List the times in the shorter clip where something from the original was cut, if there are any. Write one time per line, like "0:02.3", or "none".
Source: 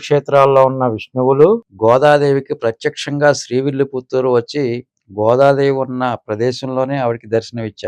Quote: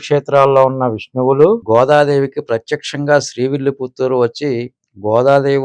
0:01.6